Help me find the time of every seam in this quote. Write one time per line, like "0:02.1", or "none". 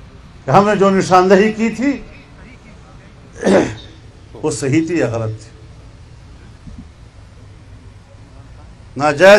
0:06.6

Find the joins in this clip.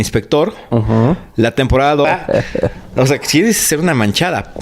0:02.1

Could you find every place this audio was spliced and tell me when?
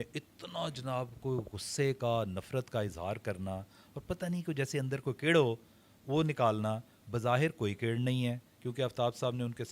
none

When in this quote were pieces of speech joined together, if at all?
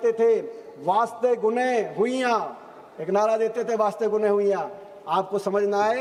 none

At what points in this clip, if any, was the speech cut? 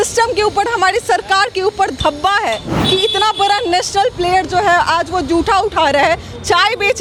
none

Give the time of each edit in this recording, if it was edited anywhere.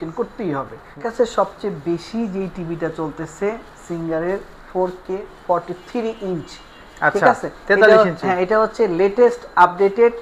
0:01.1

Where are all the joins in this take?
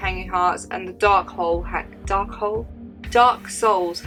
none

